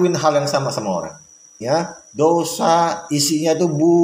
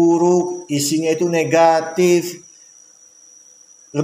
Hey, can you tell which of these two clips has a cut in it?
first; 1 cut; at 1.5 s

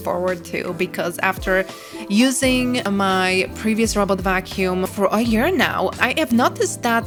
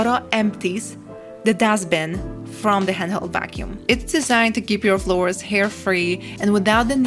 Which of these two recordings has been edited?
second; 1 cut; at 3.7 s

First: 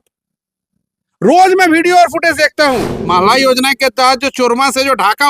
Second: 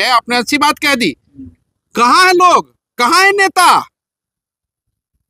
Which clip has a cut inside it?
first; 1 cut; at 2.9 s

